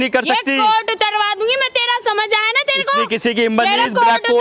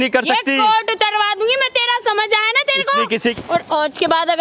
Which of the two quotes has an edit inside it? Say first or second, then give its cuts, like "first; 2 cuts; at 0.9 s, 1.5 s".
second; 1 cut; at 3.3 s